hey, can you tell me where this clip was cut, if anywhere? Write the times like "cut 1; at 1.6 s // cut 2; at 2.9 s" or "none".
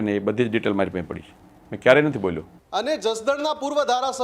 cut 1; at 2.5 s